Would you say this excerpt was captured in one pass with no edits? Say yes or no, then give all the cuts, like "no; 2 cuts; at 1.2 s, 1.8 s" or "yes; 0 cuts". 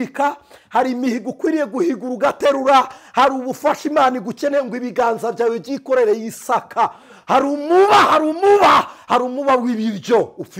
yes; 0 cuts